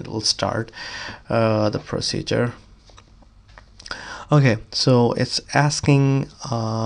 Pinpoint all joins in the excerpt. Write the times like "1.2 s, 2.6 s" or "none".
none

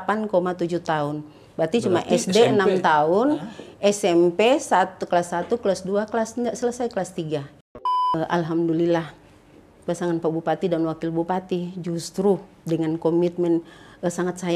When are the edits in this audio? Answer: 8.0 s

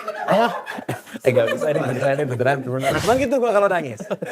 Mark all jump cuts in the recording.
3.0 s

